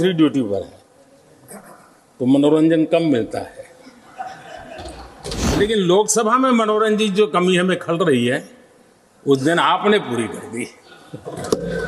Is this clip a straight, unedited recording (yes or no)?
no